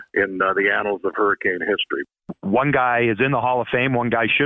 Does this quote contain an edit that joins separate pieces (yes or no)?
yes